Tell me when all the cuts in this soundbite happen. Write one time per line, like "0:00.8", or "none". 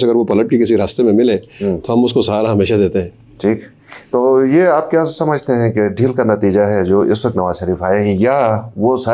none